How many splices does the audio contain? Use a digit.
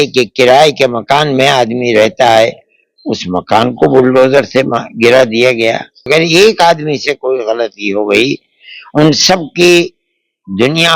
1